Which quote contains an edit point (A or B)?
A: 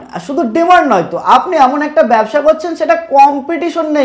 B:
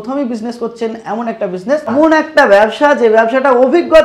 B